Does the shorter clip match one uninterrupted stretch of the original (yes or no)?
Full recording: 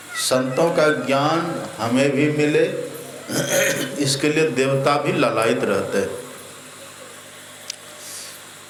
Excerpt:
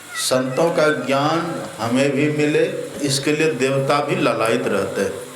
no